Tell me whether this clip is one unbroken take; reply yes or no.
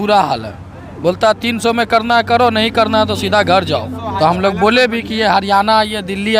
no